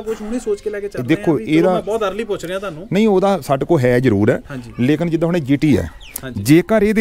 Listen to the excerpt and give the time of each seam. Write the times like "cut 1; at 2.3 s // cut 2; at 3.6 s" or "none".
none